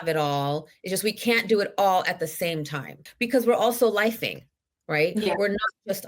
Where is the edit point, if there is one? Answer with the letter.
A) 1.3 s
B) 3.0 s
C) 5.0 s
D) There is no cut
B